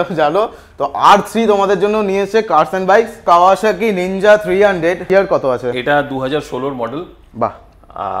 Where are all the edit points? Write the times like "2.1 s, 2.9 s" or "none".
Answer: 3.2 s, 5.1 s

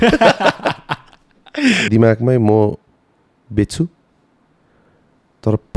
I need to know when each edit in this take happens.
1.8 s

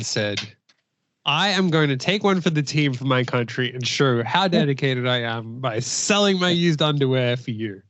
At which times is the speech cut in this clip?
none

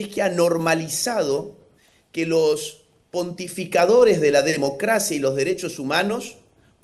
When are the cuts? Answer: none

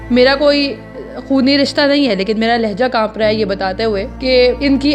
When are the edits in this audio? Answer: none

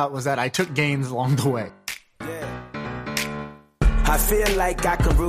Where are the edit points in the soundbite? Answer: 1.7 s

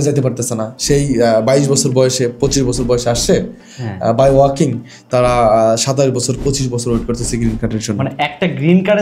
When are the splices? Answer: none

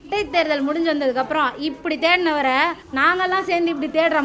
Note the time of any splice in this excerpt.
2.9 s

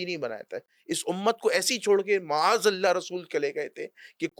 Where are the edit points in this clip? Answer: none

